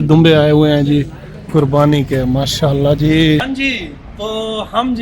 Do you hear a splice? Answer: yes; 1 cut; at 3.5 s

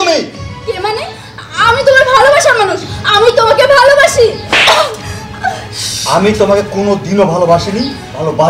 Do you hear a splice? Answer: no; 0 cuts

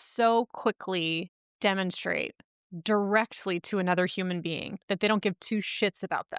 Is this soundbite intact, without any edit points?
no; 1 cut; at 1.4 s

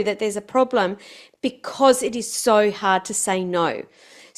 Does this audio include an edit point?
no; 0 cuts

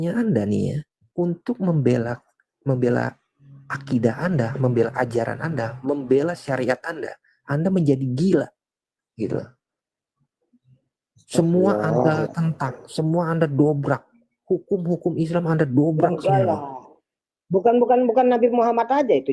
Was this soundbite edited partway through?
no; 0 cuts

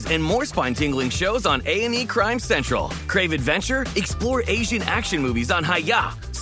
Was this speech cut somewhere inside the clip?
no; 0 cuts

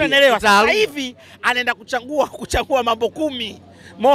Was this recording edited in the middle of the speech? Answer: no; 0 cuts

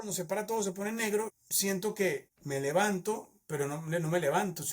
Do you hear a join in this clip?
yes; 1 cut; at 2.3 s

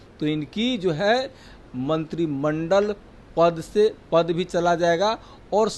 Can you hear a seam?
no; 0 cuts

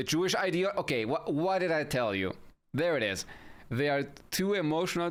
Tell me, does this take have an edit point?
no; 0 cuts

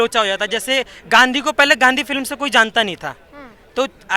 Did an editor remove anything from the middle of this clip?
yes; 1 cut; at 1.0 s

